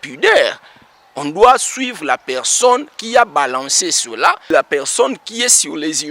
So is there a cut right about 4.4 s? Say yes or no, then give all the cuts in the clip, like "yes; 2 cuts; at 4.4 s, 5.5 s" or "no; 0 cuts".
yes; 1 cut; at 4.4 s